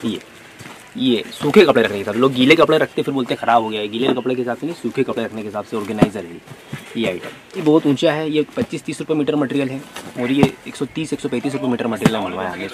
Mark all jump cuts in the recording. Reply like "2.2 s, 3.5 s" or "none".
7.6 s